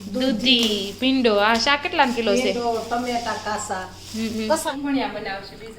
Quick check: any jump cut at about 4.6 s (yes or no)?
yes